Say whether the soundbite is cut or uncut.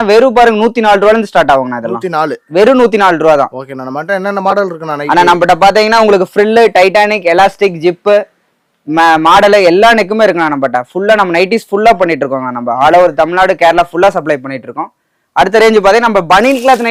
uncut